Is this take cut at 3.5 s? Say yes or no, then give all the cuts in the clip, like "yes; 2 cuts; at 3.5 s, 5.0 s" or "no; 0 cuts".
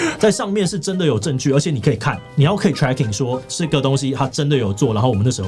yes; 1 cut; at 3.5 s